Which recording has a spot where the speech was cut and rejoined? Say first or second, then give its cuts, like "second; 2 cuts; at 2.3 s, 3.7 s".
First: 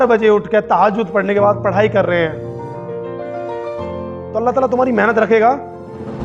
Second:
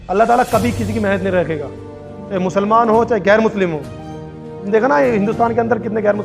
first; 2 cuts; at 2.3 s, 3.9 s